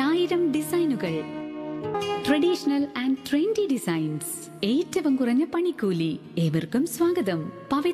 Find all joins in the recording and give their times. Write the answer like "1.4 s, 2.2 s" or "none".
1.9 s